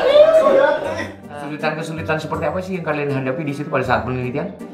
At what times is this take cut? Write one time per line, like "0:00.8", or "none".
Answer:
0:01.3